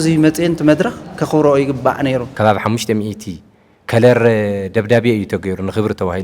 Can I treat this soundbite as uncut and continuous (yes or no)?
no